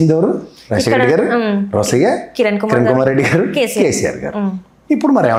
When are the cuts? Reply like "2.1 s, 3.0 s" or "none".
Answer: none

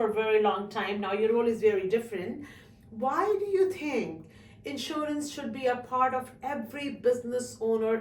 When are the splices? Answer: none

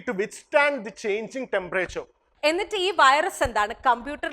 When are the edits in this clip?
2.2 s

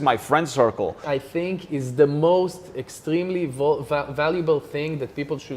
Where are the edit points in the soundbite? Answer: 1.0 s

